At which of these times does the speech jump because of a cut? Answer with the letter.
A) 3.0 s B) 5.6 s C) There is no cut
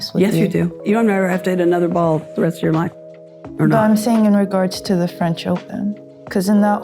A